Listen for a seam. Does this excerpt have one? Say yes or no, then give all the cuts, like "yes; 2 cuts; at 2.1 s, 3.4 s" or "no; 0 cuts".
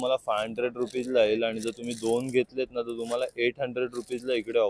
no; 0 cuts